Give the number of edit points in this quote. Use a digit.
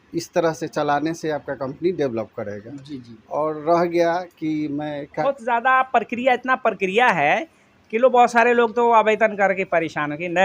1